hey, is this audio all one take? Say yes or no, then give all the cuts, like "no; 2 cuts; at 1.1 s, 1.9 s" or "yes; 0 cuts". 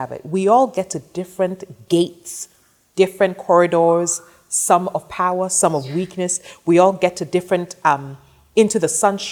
yes; 0 cuts